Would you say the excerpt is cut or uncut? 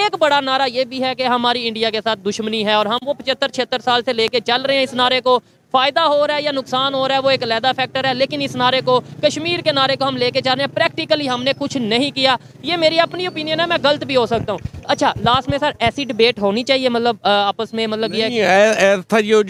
uncut